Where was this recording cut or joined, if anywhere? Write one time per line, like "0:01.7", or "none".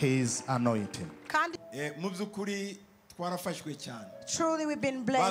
0:01.6